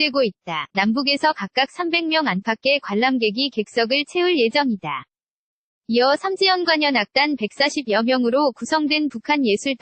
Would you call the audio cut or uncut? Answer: uncut